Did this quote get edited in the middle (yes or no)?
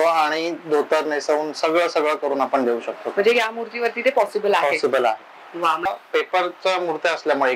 yes